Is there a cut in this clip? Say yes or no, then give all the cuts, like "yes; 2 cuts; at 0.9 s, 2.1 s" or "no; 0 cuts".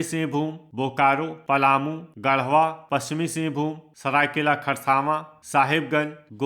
yes; 4 cuts; at 1.5 s, 2.8 s, 3.9 s, 5.4 s